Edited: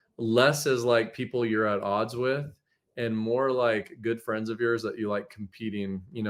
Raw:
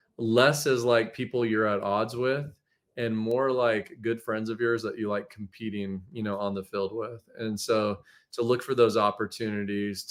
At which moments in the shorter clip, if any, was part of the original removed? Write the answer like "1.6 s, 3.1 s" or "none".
none